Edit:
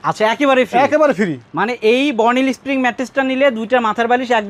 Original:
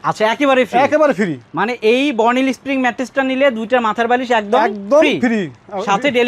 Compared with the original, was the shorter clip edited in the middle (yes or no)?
no